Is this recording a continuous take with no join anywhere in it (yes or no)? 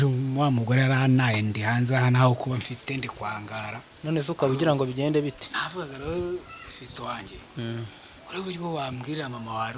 yes